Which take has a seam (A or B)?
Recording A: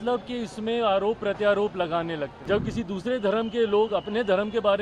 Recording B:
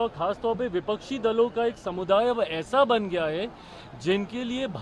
A